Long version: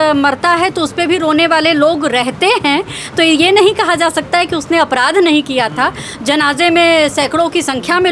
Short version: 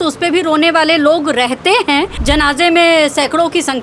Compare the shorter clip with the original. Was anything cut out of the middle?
yes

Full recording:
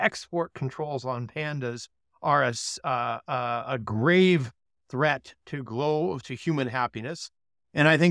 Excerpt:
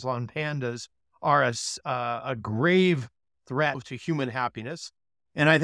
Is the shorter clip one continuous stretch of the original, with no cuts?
no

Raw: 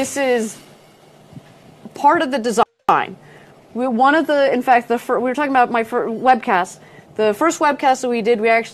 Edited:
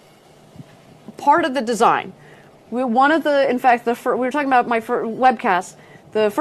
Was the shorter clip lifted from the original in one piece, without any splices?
no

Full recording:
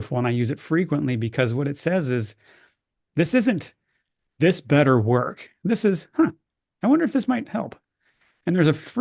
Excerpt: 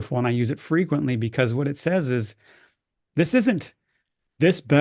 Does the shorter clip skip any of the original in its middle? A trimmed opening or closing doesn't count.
no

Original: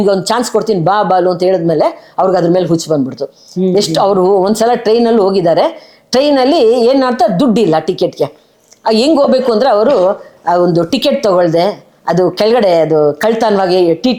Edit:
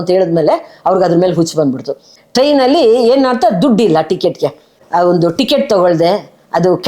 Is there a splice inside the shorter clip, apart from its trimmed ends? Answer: yes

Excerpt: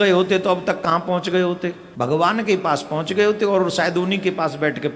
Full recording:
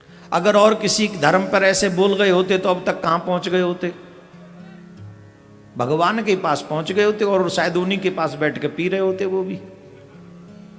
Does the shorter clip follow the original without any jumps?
no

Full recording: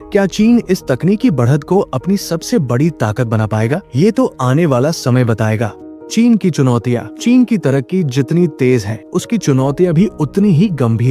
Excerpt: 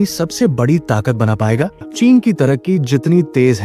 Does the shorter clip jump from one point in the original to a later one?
yes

